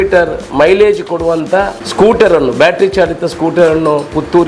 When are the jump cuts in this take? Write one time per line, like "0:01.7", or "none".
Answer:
0:01.8